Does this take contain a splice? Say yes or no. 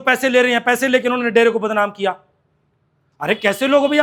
no